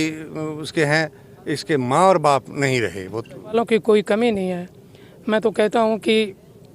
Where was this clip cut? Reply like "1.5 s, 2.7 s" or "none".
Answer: 3.5 s